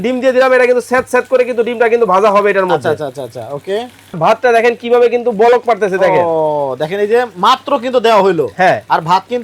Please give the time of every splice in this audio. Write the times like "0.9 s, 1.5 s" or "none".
4.2 s